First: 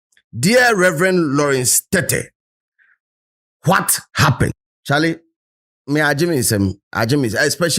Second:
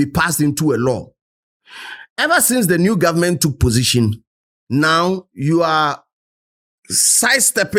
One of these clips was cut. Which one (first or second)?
first